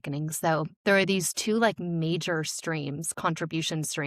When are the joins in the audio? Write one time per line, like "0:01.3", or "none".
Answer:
none

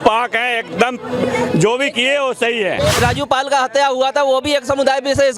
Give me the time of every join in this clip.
0:03.0

